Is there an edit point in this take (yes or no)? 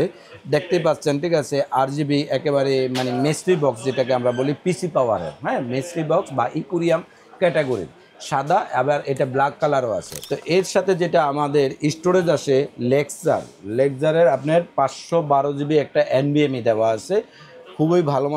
yes